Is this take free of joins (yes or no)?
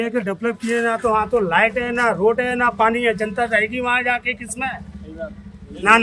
yes